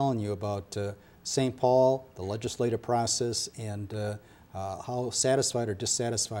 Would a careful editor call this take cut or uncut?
uncut